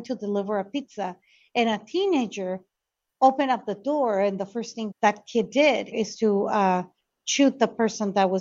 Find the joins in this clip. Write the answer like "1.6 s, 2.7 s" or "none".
4.8 s